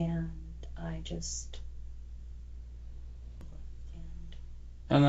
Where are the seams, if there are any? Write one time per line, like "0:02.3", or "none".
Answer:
0:03.4